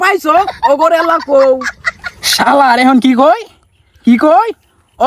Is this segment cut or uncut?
cut